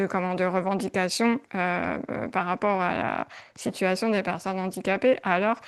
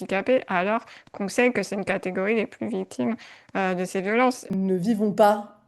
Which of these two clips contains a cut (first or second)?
second